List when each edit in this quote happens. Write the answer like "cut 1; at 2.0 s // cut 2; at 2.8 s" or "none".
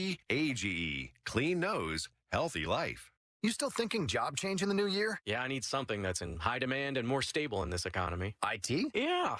cut 1; at 3.2 s